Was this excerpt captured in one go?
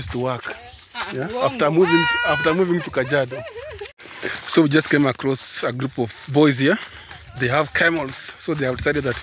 no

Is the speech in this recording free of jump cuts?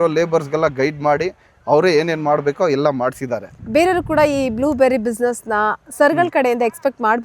yes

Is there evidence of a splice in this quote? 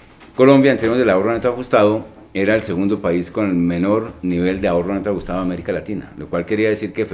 yes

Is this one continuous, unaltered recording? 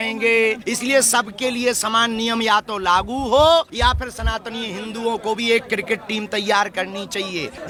yes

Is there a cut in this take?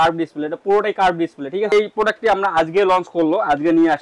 yes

